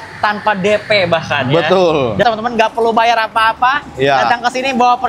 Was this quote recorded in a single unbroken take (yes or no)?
no